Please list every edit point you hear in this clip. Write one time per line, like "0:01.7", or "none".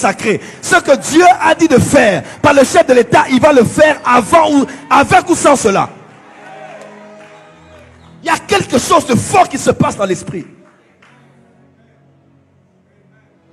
none